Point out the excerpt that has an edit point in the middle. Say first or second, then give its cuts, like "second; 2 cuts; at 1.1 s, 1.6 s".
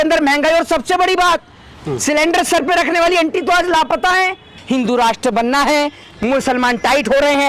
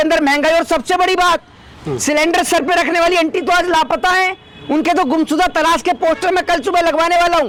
first; 1 cut; at 4.6 s